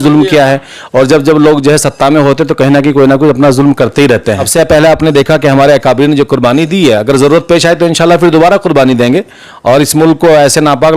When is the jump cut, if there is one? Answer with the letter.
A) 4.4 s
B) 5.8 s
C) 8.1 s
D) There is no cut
A